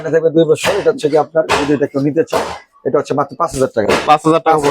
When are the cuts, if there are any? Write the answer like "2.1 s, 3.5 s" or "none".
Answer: none